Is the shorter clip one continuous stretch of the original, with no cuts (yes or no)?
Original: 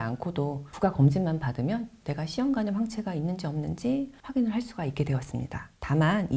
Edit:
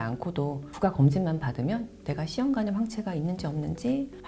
yes